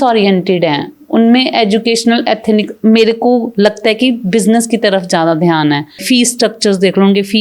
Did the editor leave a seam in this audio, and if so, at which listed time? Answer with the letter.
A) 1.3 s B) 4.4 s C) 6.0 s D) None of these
C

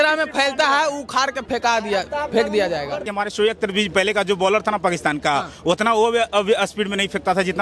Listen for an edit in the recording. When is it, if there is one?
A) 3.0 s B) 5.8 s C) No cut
A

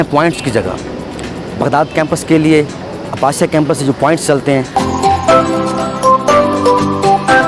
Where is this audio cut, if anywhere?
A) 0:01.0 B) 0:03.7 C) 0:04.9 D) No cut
C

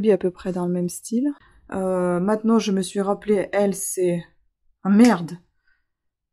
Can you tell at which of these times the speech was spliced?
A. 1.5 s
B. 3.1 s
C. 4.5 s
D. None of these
A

